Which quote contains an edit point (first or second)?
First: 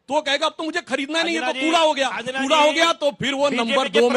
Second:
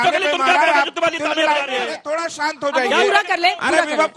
second